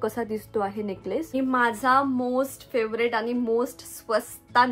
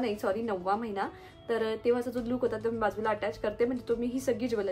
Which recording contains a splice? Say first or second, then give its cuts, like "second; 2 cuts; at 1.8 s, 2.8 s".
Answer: first; 1 cut; at 1.3 s